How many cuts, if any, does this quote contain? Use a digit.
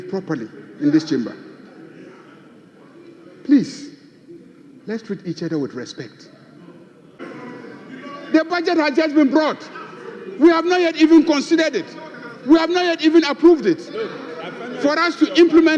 1